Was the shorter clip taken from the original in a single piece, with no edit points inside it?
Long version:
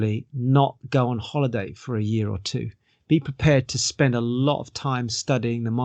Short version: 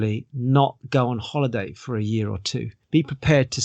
no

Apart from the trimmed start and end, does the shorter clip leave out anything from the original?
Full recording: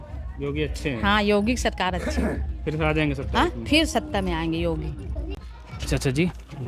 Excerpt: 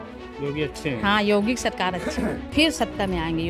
yes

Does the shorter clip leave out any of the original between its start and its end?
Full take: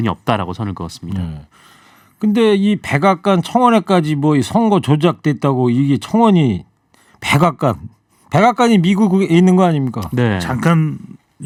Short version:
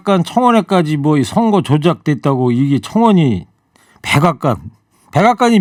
no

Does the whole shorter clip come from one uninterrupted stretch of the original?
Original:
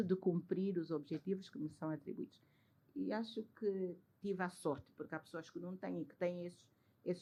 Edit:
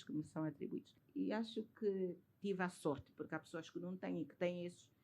no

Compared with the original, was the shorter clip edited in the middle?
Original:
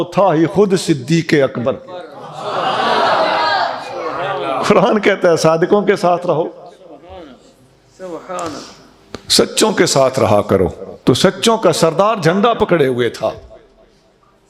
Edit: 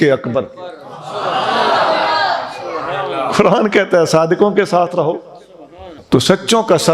yes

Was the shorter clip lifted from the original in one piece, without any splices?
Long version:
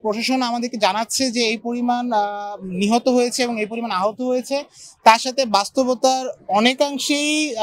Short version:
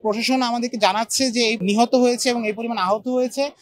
no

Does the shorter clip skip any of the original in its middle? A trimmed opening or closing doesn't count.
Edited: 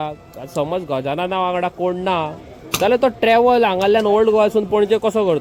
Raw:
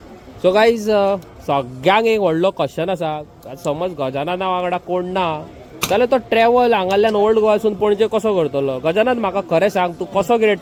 no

